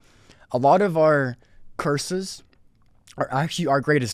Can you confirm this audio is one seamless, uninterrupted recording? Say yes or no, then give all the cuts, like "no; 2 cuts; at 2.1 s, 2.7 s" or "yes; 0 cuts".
yes; 0 cuts